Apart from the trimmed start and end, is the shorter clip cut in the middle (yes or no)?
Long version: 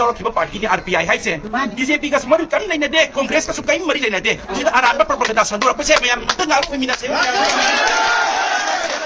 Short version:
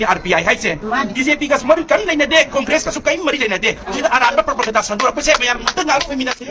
no